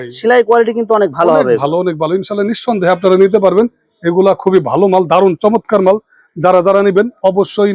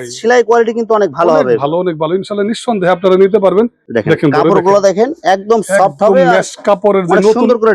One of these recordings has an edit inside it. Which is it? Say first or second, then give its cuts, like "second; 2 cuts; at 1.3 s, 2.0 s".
second; 1 cut; at 3.9 s